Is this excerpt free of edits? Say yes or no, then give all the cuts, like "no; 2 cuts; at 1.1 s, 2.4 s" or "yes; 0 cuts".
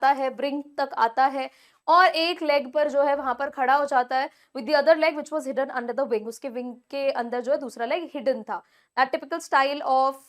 yes; 0 cuts